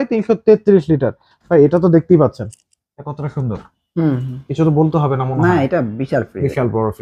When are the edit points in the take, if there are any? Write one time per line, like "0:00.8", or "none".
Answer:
none